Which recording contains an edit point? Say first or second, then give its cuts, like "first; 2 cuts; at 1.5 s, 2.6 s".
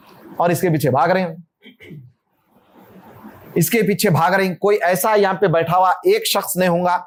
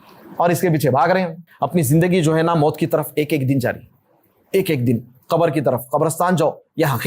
second; 1 cut; at 1.4 s